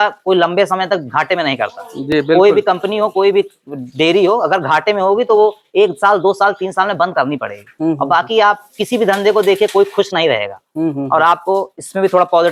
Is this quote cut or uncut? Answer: uncut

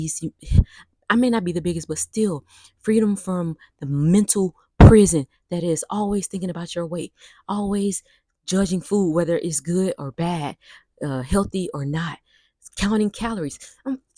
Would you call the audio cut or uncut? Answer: uncut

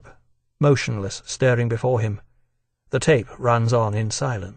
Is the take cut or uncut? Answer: cut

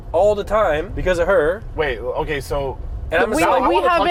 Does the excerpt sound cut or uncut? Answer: uncut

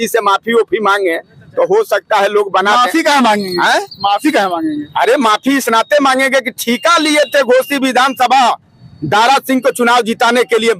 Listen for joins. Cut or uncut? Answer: uncut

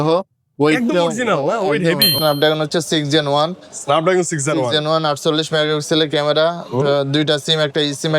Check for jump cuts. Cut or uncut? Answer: cut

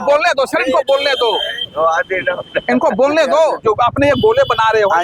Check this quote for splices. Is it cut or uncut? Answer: uncut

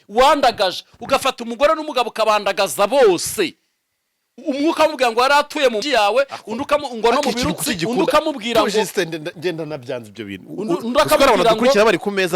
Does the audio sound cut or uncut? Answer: cut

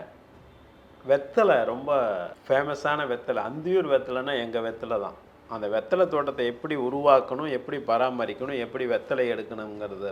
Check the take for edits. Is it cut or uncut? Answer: cut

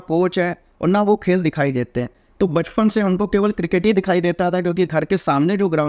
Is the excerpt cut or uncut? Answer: uncut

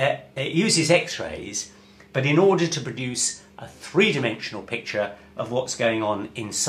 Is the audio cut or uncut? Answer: cut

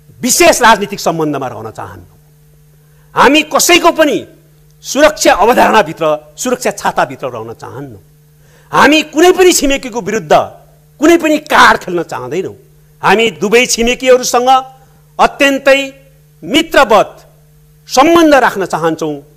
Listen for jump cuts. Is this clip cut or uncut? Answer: uncut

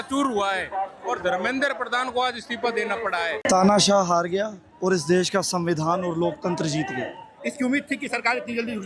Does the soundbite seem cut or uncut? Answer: cut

